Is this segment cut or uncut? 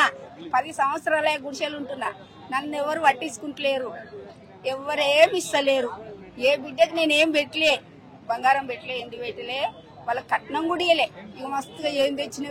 uncut